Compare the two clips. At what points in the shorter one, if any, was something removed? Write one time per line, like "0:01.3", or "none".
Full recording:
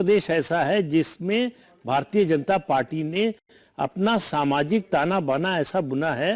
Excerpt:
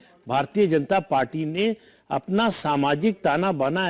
0:01.9